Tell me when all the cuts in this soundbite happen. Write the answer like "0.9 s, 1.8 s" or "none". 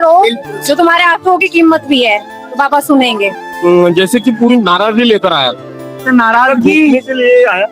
3.4 s

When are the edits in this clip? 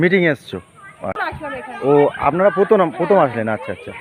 1.2 s

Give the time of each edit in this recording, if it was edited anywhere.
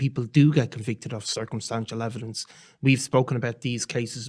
2.5 s

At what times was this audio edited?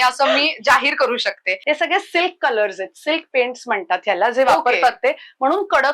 1.5 s

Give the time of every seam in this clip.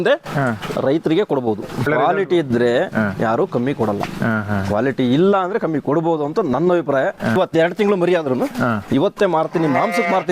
1.9 s

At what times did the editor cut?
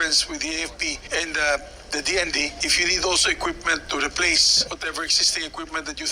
1.0 s, 2.6 s, 4.5 s

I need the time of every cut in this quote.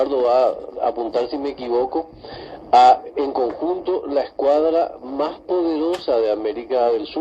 4.5 s

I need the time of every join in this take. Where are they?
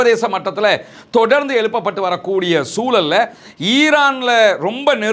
none

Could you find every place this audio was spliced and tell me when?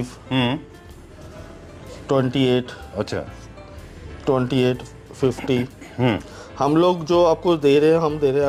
none

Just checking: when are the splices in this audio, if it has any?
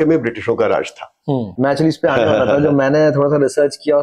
1.5 s

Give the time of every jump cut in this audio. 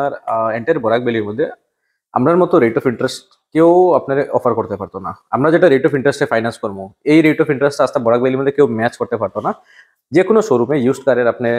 none

